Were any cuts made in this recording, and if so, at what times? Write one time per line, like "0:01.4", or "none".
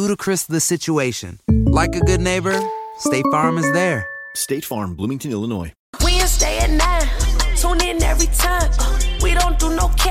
0:05.8